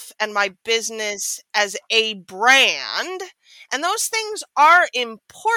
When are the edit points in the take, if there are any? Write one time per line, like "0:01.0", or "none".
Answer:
none